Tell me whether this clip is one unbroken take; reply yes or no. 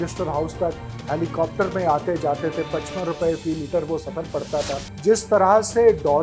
no